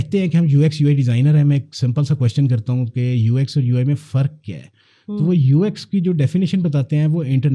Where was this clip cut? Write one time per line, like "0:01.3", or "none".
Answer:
none